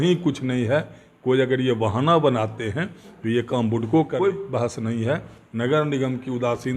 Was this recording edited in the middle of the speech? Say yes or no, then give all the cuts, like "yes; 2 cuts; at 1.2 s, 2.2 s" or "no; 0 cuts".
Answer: yes; 1 cut; at 4.2 s